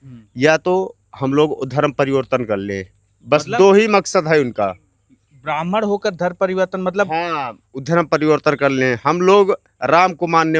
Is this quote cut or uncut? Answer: uncut